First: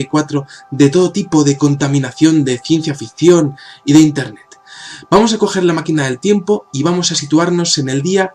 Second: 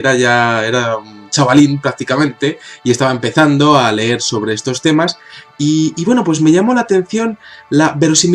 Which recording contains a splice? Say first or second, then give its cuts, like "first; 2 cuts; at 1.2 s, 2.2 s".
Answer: second; 1 cut; at 7.2 s